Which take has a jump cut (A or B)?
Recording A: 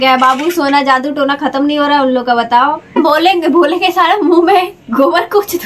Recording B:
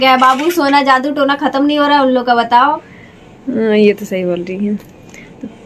A